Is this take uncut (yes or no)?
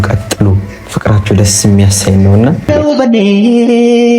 no